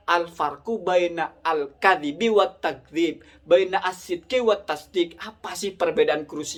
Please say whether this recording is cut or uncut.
uncut